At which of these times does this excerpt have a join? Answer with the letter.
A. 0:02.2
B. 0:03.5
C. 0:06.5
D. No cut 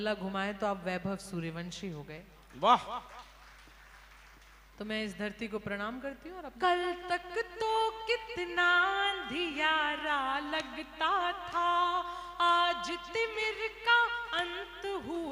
C